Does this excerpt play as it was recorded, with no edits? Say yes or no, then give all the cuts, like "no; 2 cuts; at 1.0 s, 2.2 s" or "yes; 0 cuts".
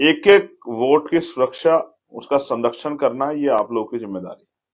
yes; 0 cuts